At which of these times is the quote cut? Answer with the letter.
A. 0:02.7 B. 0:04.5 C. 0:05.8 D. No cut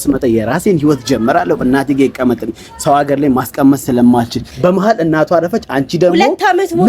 B